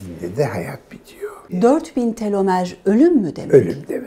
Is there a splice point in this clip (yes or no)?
yes